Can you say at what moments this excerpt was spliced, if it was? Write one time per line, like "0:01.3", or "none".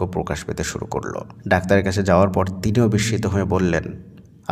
0:01.3